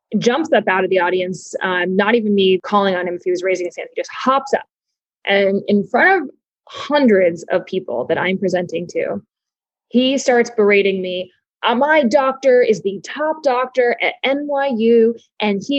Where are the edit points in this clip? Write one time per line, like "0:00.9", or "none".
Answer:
0:02.6